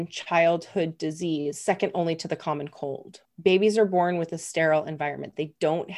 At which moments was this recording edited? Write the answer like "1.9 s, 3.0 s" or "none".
3.2 s